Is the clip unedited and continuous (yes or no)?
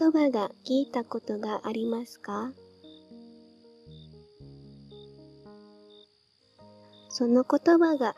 no